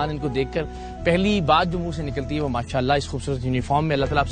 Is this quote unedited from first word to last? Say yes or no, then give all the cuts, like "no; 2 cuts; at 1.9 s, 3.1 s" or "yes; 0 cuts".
yes; 0 cuts